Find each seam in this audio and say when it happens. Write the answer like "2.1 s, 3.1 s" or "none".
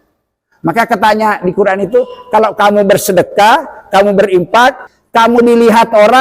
4.9 s